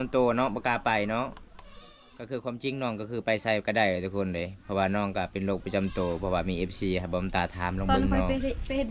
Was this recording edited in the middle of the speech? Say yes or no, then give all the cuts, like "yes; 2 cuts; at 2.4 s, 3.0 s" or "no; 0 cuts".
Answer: no; 0 cuts